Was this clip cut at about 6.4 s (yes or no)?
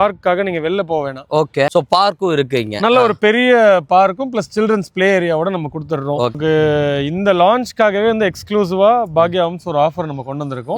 yes